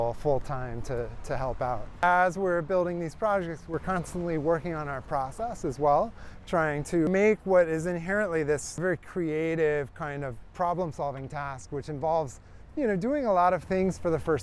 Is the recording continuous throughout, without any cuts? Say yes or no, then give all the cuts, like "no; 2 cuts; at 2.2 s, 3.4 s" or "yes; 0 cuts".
no; 3 cuts; at 1.9 s, 7.1 s, 8.8 s